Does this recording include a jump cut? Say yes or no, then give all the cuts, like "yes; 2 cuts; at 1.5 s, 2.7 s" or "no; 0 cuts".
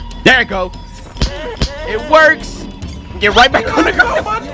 no; 0 cuts